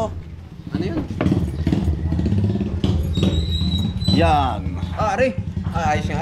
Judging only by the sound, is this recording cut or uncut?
uncut